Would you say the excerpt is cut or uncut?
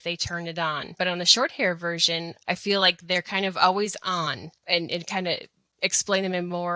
cut